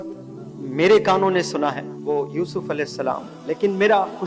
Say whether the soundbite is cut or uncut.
cut